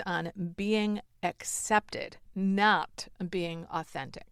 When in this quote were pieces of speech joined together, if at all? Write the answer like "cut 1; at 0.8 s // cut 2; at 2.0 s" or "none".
none